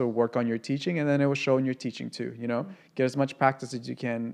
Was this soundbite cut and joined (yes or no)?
no